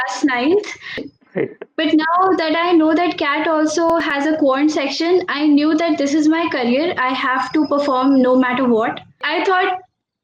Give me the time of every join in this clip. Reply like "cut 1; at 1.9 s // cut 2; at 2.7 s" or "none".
cut 1; at 0.9 s // cut 2; at 9.2 s